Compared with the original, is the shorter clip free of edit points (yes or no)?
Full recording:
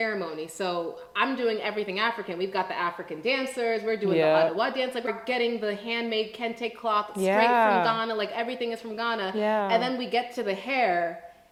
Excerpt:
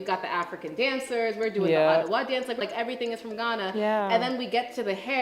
no